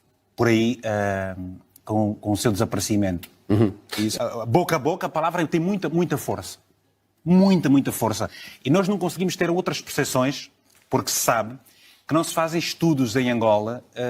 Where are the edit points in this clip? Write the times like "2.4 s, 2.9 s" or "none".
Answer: 4.2 s